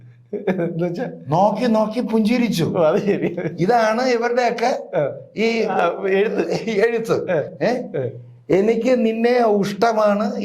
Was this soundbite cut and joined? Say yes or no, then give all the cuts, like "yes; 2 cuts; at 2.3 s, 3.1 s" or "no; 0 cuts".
no; 0 cuts